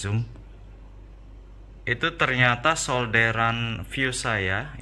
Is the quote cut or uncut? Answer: uncut